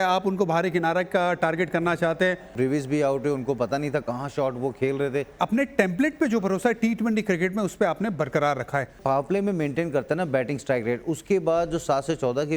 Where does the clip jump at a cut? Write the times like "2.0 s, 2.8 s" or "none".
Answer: 2.5 s, 5.4 s, 9.0 s